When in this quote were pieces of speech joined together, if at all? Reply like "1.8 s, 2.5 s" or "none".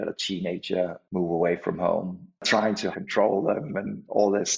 1.0 s, 2.5 s